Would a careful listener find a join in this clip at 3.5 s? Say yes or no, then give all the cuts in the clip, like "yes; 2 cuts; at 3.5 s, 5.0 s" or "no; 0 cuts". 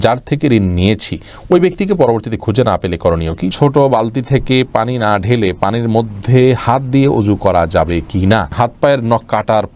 yes; 2 cuts; at 3.5 s, 8.5 s